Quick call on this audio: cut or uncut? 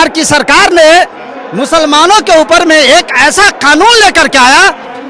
uncut